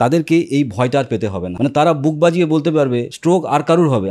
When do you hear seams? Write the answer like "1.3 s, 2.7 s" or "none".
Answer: 1.4 s, 3.1 s